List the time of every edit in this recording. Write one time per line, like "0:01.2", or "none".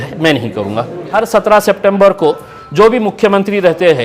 0:01.0